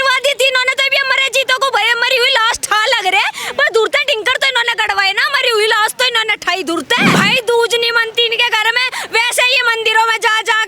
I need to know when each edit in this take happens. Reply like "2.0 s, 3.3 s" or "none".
7.1 s